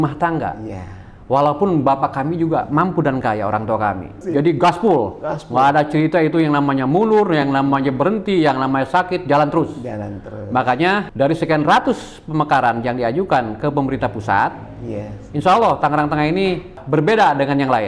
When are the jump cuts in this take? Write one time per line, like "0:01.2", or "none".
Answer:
0:04.1
0:11.1
0:16.8